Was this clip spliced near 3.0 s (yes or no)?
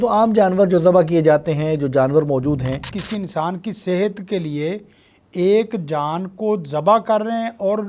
yes